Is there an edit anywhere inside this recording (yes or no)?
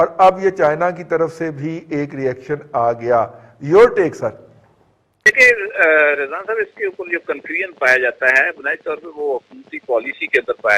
no